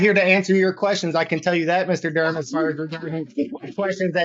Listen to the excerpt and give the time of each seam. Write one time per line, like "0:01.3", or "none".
none